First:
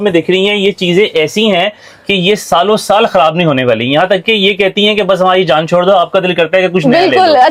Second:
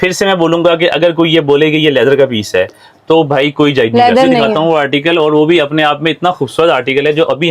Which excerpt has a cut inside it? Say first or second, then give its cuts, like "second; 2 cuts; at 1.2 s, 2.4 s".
second; 1 cut; at 4.5 s